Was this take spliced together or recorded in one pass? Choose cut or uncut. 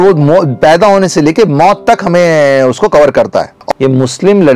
cut